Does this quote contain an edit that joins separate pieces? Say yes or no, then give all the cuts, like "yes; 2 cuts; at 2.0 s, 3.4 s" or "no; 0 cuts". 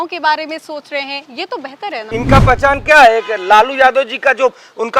yes; 1 cut; at 2.1 s